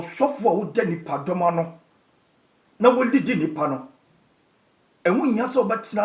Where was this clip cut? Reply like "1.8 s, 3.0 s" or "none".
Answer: none